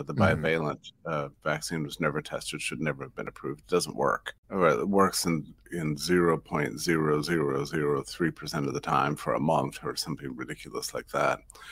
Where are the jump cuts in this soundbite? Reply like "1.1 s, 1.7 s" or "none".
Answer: 4.3 s